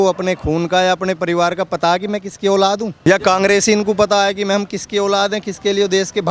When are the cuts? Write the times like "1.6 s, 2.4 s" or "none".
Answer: 3.1 s